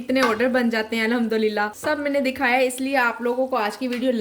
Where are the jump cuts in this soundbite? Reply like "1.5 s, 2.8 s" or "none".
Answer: 1.8 s